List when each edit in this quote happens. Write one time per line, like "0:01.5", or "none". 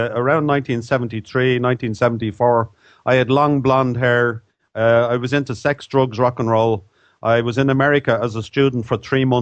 none